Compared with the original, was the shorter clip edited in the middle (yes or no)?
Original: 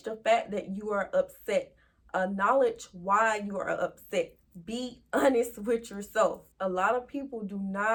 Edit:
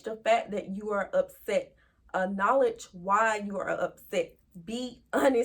no